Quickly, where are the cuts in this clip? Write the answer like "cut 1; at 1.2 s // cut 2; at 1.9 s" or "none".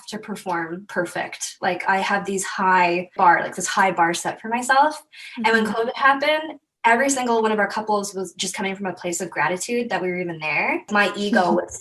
cut 1; at 3.1 s // cut 2; at 10.9 s